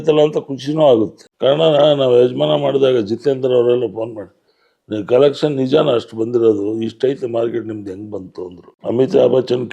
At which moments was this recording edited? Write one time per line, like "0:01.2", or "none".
0:01.2
0:08.6